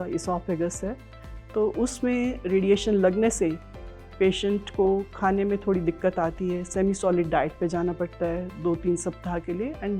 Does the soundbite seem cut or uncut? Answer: uncut